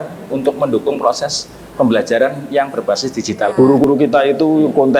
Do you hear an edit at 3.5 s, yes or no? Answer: yes